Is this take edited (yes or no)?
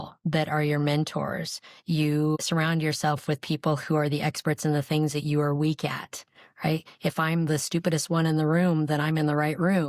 yes